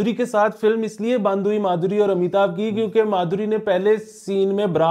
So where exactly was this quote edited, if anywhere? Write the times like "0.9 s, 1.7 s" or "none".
none